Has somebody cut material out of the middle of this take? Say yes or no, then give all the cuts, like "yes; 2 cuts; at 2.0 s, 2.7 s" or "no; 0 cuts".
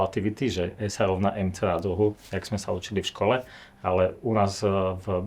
no; 0 cuts